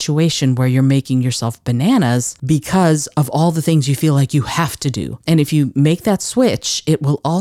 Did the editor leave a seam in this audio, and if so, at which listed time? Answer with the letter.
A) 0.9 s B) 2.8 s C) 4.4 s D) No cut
D